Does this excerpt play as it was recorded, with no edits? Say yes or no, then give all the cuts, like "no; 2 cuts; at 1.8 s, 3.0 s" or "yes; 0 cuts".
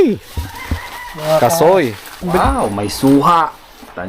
no; 1 cut; at 2.4 s